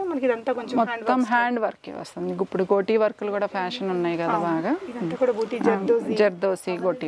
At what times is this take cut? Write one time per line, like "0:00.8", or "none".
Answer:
none